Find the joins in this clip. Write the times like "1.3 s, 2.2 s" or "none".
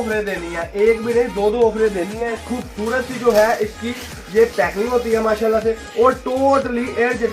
2.6 s